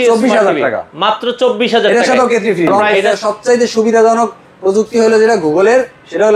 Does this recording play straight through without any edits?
no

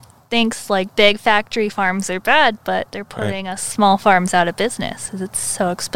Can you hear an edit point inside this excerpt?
no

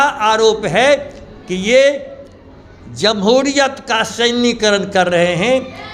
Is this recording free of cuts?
yes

